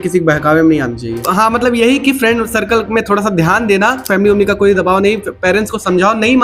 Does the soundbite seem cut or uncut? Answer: cut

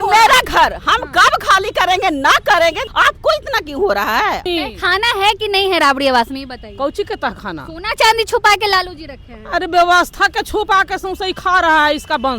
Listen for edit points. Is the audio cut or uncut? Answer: cut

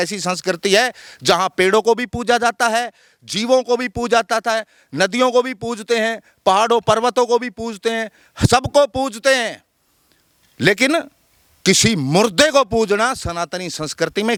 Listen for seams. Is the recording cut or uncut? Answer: uncut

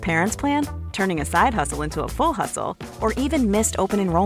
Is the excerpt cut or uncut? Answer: uncut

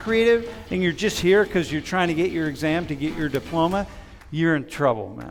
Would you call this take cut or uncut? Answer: uncut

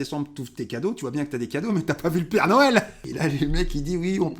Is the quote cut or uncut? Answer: cut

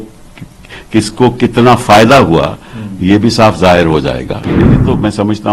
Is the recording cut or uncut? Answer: cut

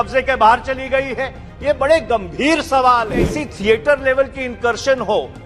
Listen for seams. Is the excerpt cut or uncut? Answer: cut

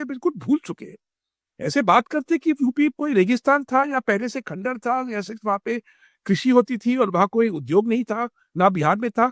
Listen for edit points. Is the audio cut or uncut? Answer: uncut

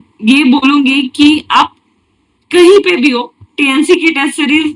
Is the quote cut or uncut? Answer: uncut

